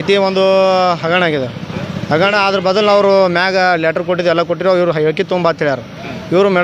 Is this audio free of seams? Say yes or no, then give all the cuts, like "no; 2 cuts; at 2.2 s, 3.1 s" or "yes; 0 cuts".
yes; 0 cuts